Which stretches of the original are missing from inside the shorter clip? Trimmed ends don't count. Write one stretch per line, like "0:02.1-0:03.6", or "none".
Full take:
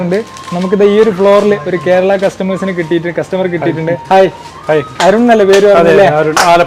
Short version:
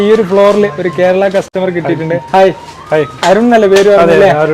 0:02.4-0:03.3